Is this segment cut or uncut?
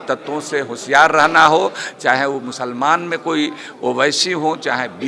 uncut